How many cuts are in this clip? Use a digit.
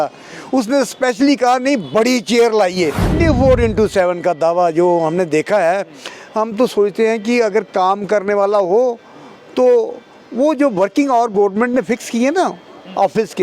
1